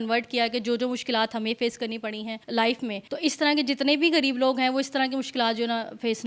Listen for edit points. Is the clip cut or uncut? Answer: cut